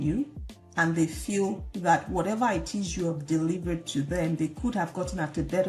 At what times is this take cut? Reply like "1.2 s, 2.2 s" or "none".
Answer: none